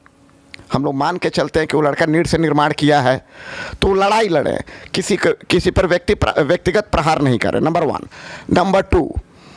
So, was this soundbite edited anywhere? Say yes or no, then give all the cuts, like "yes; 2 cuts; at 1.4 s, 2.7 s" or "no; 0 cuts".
no; 0 cuts